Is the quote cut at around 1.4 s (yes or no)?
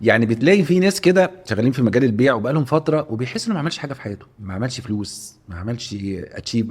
yes